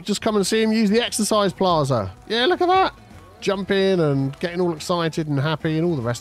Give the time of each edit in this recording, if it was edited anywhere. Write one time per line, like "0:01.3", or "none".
0:02.2

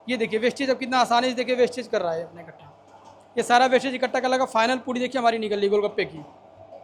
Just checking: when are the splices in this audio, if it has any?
none

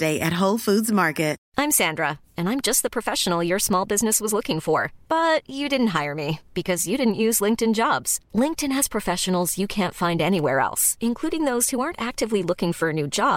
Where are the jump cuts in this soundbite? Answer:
0:01.4

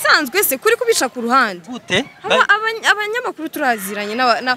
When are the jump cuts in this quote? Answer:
none

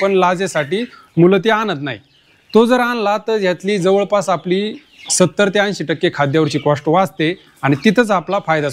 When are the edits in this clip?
none

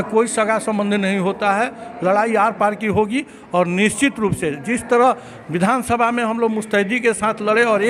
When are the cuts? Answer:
none

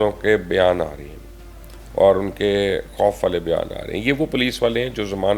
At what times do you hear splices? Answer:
none

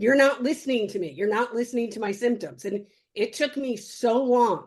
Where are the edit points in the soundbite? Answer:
none

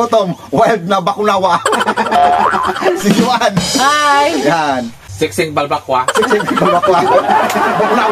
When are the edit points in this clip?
0:05.0

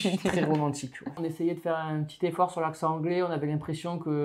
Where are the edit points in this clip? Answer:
0:01.2

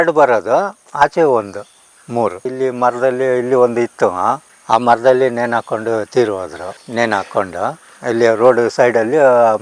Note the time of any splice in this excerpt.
none

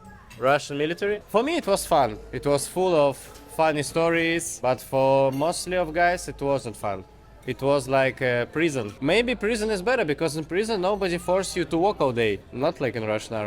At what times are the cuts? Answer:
0:01.2
0:04.5
0:08.9
0:12.5

